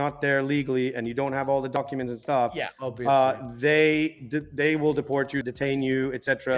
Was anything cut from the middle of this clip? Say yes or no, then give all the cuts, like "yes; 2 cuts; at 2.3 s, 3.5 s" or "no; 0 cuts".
yes; 1 cut; at 5.4 s